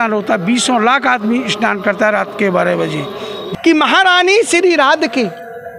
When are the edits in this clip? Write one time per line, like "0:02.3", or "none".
0:03.4